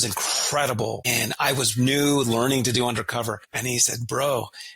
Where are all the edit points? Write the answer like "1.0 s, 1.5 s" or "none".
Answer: 1.1 s, 3.5 s

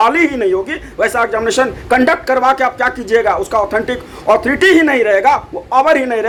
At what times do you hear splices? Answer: none

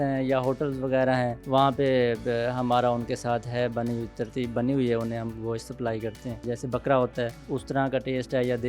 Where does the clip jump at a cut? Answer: 1.4 s, 6.4 s, 7.4 s

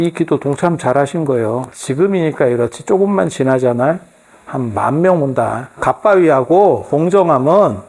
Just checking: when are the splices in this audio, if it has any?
1.8 s, 5.8 s, 6.8 s

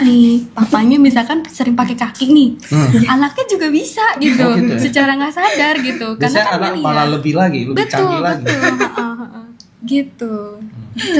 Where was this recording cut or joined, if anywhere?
none

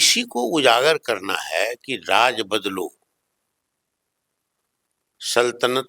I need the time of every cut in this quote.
none

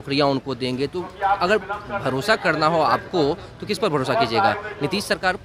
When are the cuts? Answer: none

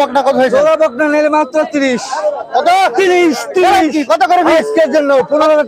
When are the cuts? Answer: none

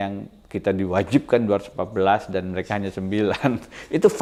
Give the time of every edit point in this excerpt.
none

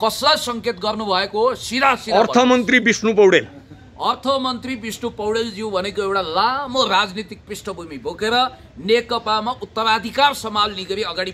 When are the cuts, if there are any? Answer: none

